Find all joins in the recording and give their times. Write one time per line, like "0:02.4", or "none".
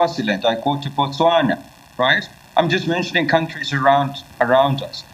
none

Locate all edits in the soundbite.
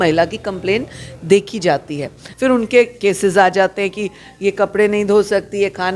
0:02.2

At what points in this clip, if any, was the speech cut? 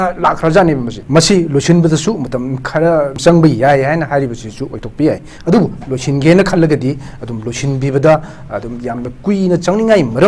0:00.9
0:03.2

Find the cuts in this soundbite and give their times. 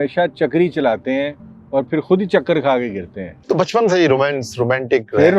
0:03.3

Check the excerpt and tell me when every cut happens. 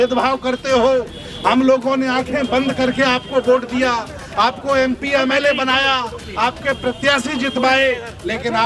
none

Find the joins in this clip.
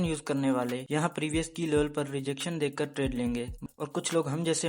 0:00.8
0:03.6

